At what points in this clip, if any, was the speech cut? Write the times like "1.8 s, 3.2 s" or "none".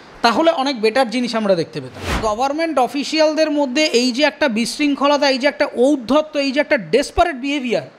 2.2 s